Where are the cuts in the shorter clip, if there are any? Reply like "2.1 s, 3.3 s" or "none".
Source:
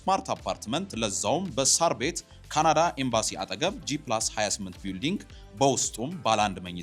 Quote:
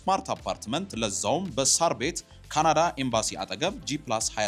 none